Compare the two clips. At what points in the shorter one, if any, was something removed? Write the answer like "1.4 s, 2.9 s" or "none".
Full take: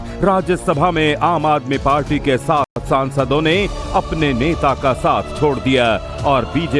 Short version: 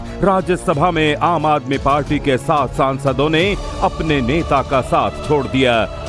2.7 s